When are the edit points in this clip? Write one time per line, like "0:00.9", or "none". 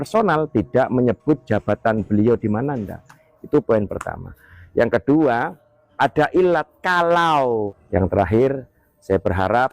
0:07.8